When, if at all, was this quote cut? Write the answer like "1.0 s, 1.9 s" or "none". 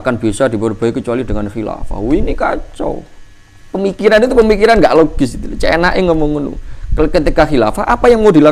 none